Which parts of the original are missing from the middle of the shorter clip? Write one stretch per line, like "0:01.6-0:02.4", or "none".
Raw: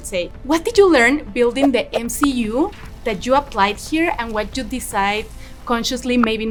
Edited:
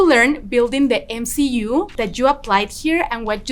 0:02.8-0:03.0